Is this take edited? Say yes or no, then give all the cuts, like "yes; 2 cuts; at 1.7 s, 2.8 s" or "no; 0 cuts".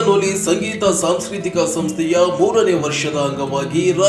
no; 0 cuts